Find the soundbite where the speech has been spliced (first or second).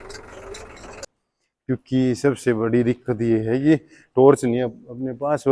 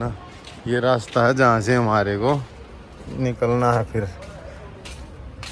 first